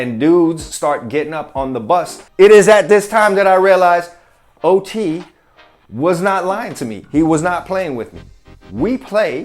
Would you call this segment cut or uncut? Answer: cut